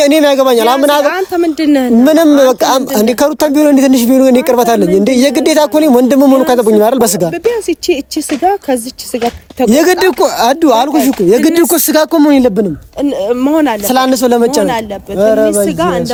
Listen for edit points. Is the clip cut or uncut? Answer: uncut